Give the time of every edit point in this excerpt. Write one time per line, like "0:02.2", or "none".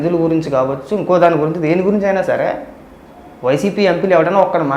none